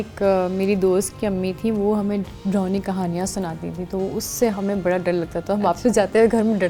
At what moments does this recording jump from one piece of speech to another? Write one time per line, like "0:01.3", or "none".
none